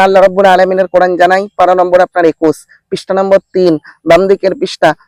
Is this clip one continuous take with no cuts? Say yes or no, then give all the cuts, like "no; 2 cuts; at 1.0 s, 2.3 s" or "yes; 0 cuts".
yes; 0 cuts